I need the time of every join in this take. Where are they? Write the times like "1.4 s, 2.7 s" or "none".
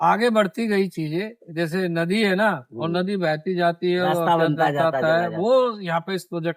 none